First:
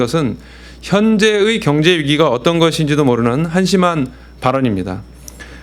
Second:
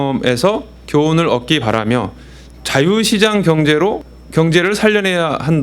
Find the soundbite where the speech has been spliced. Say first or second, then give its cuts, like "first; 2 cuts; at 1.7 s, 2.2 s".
second; 1 cut; at 4.0 s